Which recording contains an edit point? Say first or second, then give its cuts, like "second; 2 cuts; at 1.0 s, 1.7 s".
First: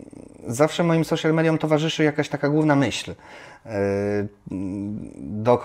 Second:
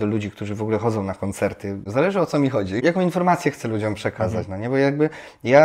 second; 2 cuts; at 1.9 s, 2.8 s